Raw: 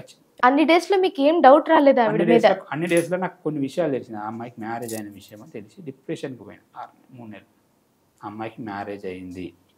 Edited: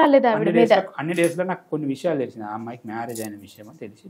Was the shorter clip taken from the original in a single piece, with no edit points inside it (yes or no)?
yes